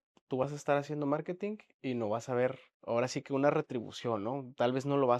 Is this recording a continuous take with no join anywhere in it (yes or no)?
no